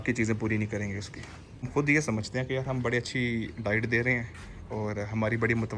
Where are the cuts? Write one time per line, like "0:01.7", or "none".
0:01.7